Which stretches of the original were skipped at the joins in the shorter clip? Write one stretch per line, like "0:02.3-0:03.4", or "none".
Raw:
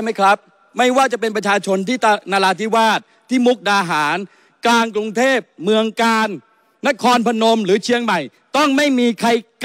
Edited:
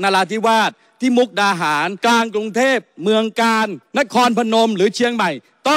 0:04.2-0:04.5
0:06.4-0:06.7

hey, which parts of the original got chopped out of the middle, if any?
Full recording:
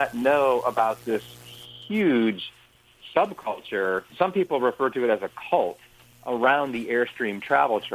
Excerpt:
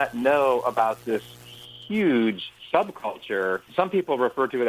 0:02.5-0:02.9

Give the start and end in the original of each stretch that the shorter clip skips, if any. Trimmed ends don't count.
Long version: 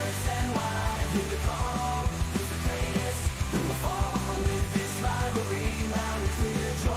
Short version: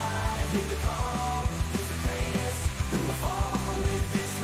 none

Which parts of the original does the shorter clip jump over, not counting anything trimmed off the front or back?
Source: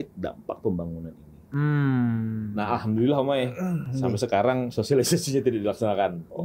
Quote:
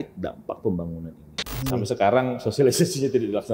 0:01.5-0:03.8

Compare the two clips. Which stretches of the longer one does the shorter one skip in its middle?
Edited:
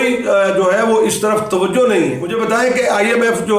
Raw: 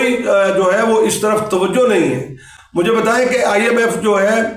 0:02.2-0:02.8

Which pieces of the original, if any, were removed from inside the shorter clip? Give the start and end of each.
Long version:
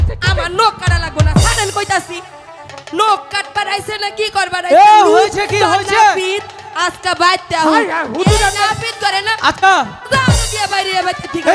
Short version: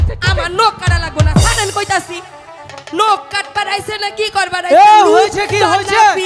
none

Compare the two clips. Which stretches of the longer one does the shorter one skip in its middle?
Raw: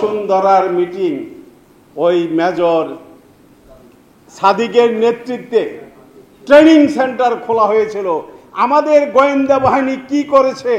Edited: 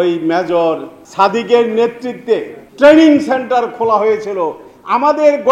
0:03.0-0:04.2
0:05.8-0:06.3

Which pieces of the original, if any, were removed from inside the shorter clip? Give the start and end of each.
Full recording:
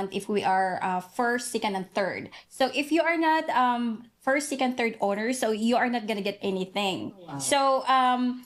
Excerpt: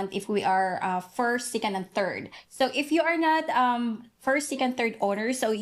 none

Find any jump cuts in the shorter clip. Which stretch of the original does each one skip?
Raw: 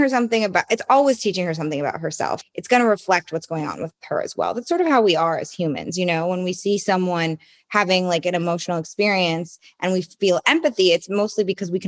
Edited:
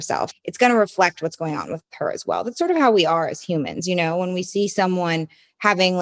none

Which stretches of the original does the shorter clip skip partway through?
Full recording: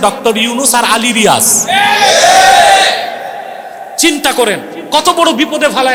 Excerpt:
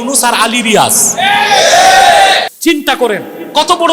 0:03.0-0:03.9

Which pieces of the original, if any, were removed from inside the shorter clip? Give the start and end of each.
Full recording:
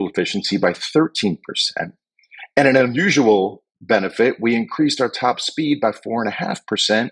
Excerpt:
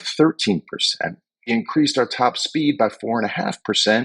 0:02.3-0:04.5

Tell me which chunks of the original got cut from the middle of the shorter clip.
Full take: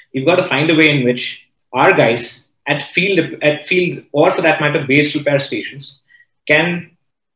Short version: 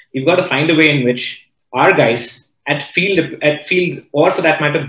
none

